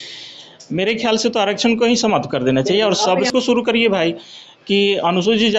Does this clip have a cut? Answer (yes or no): yes